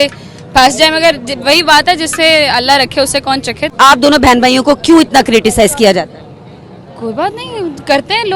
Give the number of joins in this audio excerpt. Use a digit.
1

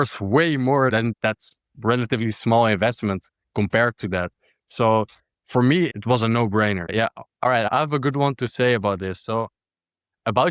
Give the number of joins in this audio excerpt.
3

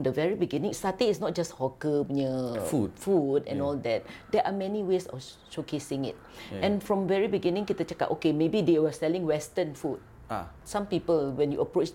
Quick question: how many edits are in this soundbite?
0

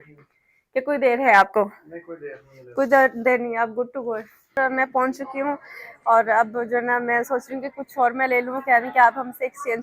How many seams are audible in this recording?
1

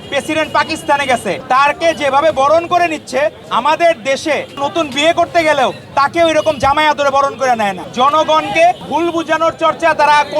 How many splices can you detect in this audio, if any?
5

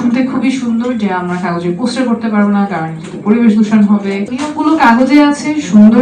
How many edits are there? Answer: 1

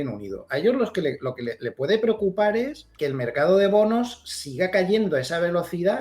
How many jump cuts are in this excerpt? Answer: 1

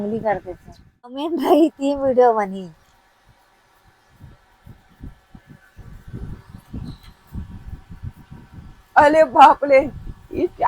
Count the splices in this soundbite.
1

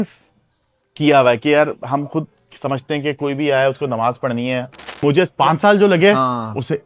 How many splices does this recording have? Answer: 1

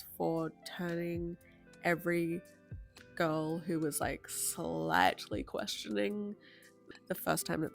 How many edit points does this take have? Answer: 1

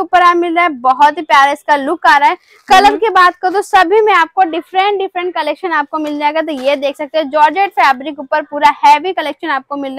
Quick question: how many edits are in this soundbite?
0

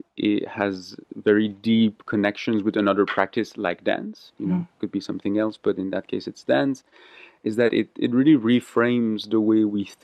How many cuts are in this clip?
0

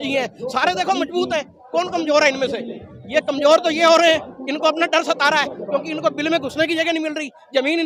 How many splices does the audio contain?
0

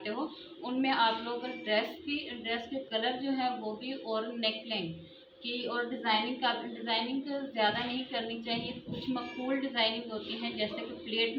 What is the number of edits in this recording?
0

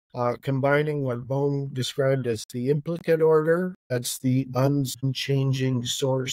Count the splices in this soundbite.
2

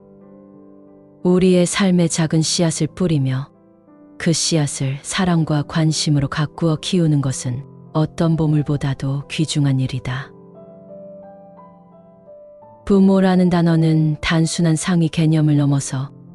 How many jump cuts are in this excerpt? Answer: 0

